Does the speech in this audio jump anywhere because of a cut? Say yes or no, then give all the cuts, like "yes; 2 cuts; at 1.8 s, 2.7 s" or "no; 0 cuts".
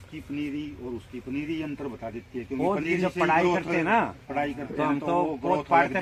no; 0 cuts